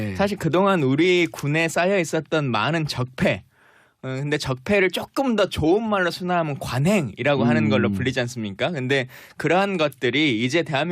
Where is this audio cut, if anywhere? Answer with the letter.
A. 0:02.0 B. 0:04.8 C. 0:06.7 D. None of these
C